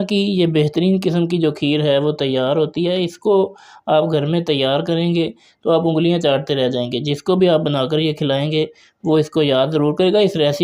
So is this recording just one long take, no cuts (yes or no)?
yes